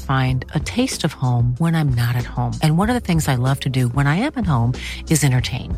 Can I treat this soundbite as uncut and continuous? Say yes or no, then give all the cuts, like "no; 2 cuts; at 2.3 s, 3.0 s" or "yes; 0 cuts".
yes; 0 cuts